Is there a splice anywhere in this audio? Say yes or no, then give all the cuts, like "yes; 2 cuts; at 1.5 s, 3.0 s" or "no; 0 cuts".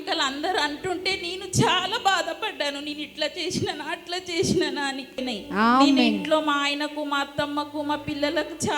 yes; 1 cut; at 5.2 s